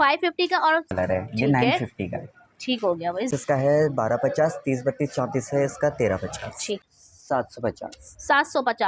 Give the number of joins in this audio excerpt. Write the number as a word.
three